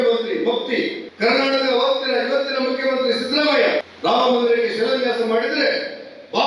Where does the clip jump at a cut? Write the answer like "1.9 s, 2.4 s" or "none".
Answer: 1.0 s, 3.9 s

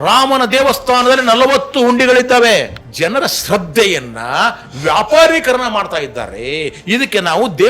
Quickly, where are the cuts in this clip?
2.8 s

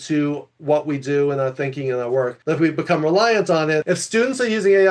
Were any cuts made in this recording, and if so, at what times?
2.4 s, 3.8 s

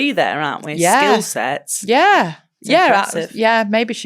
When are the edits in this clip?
none

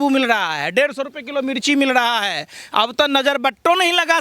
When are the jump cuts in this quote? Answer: none

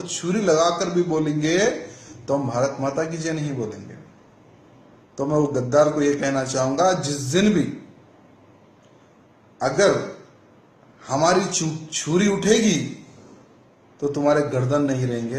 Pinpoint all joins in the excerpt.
7.1 s

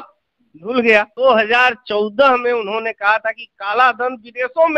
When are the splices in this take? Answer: 1.1 s

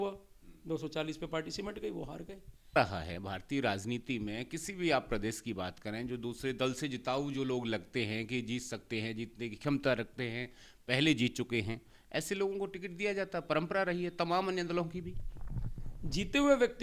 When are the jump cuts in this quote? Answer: 2.8 s

